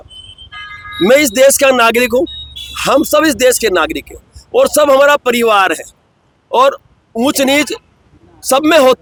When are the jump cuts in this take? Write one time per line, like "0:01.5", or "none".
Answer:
none